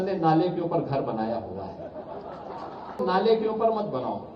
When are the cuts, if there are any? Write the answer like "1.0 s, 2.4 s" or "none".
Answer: 3.0 s